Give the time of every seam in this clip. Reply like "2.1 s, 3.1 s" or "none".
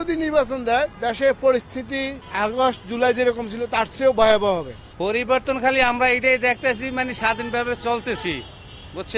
1.0 s, 2.2 s, 4.9 s